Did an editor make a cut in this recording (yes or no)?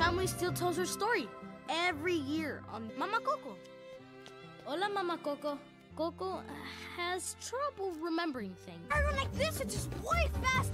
yes